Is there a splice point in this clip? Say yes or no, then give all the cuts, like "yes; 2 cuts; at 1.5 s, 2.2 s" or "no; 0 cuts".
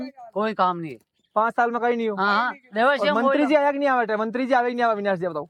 no; 0 cuts